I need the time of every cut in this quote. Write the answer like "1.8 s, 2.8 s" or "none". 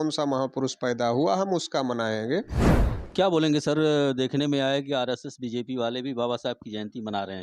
2.6 s

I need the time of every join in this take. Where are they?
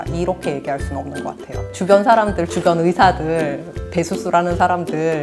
1.7 s

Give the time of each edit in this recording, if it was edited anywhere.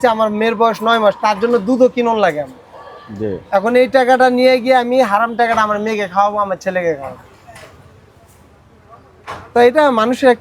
none

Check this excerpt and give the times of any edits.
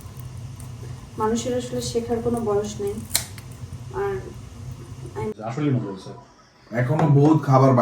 5.3 s

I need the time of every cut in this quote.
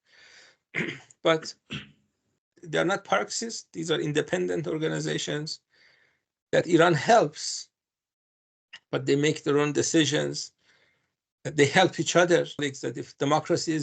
12.6 s

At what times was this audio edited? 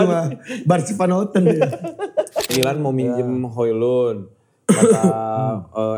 2.5 s

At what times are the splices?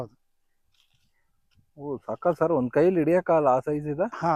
none

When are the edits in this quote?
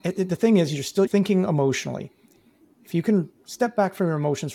1.1 s

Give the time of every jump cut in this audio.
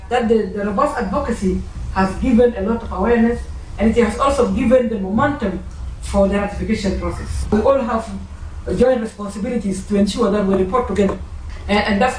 7.5 s

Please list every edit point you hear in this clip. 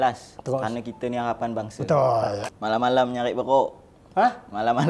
2.4 s

